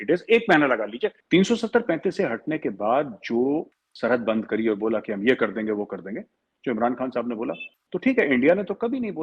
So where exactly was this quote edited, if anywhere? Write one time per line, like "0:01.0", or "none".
0:01.2
0:03.8
0:07.7